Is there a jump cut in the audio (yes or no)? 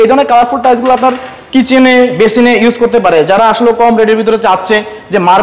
no